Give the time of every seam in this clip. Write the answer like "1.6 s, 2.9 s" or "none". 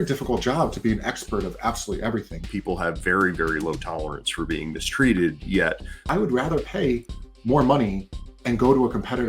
2.4 s, 6.0 s